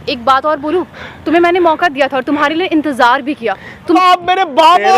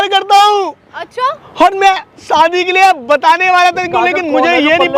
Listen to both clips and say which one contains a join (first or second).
first